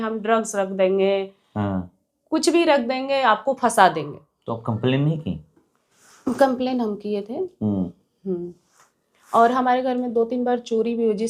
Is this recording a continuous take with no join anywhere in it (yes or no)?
yes